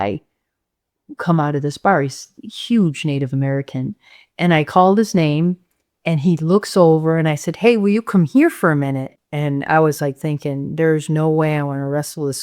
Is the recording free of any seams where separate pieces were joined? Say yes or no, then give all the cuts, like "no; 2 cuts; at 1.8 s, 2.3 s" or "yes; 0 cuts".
no; 1 cut; at 9.0 s